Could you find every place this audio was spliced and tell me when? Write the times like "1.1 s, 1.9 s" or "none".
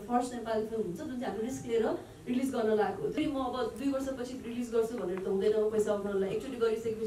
3.1 s